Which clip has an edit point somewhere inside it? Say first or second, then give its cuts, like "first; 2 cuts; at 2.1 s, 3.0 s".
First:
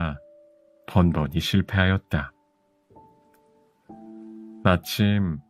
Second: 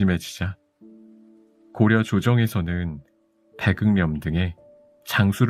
first; 2 cuts; at 2.4 s, 4.3 s